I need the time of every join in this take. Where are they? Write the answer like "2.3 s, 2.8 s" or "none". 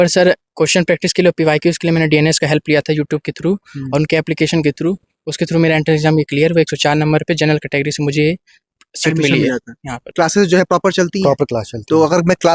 10.0 s

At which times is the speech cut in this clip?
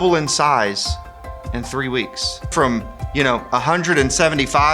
2.5 s

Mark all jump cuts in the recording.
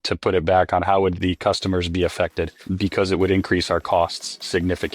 1.1 s

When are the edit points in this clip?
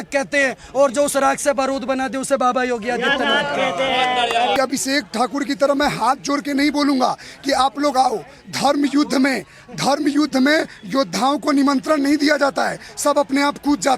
none

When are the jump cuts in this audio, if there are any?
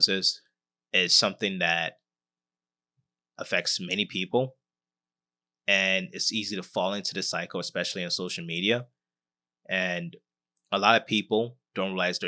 none

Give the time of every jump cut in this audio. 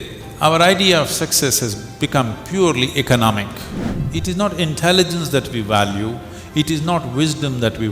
3.9 s

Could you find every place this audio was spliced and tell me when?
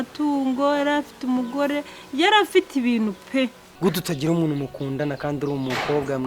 3.6 s

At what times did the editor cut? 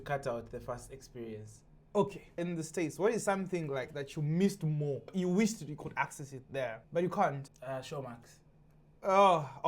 2.2 s, 5.1 s, 6.8 s, 7.5 s

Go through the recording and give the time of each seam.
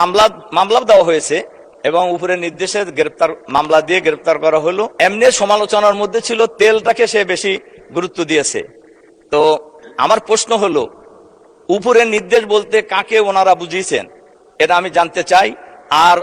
4.9 s

